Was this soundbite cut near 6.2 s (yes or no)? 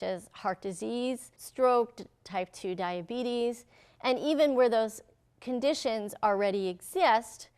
no